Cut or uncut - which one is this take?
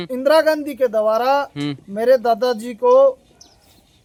uncut